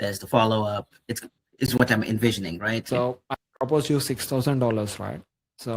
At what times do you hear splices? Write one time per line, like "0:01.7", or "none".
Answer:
0:02.8